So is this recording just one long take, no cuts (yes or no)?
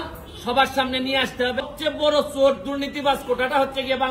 no